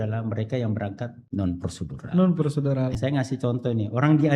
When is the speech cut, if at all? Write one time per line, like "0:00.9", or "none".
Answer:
0:01.2
0:02.9